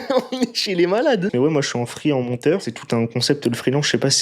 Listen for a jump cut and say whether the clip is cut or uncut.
cut